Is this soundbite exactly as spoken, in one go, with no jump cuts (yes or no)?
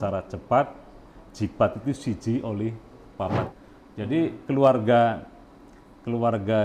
no